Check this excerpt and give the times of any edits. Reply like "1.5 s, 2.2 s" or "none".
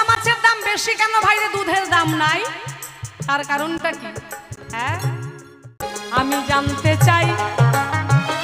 5.9 s